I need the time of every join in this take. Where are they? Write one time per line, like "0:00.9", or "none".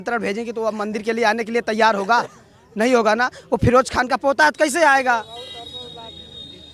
none